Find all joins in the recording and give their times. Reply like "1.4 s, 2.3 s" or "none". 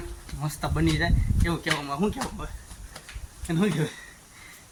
none

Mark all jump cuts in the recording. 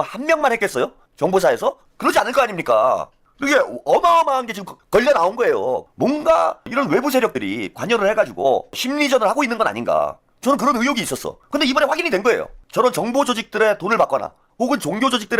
5.9 s, 10.3 s, 11.3 s, 12.6 s, 14.4 s

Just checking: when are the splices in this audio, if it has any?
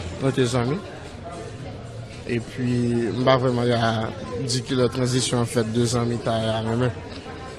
1.5 s

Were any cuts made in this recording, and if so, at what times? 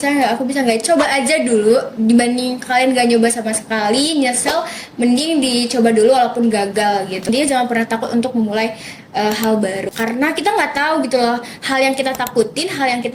7.3 s, 9.9 s

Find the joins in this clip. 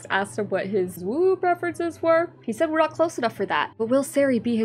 1.0 s

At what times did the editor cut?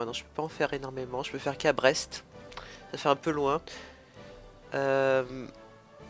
none

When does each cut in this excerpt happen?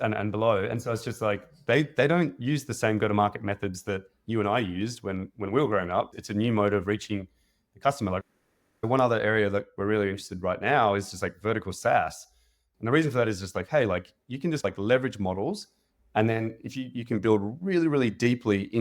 6.2 s, 8.2 s

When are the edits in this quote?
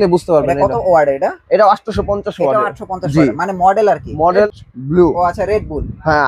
4.5 s

